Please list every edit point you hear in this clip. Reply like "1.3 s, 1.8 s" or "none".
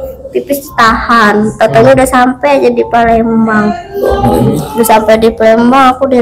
none